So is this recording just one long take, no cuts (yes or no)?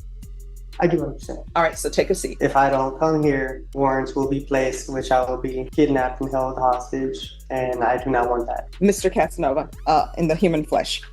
no